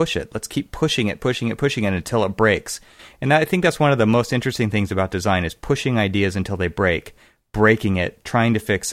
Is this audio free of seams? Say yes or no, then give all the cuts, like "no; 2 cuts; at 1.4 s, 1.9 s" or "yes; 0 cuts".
yes; 0 cuts